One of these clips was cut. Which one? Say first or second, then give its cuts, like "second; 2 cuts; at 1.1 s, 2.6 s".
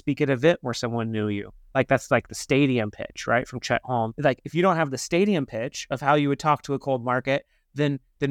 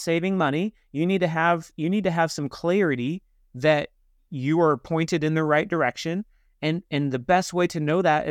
first; 1 cut; at 4.1 s